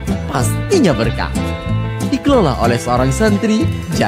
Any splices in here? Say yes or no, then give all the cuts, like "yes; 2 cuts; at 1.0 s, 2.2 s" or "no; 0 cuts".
no; 0 cuts